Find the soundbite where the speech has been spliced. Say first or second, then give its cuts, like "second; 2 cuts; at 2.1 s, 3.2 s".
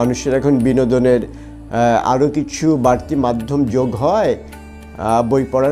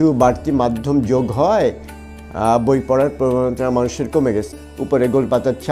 second; 1 cut; at 4.5 s